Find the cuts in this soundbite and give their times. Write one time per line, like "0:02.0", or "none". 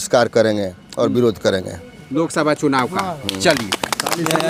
none